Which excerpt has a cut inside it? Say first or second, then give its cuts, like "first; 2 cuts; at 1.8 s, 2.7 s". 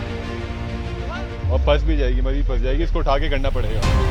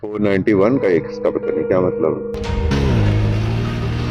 second; 1 cut; at 2.6 s